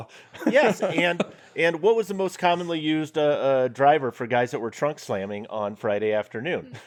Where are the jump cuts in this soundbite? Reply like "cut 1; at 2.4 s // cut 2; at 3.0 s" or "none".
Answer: none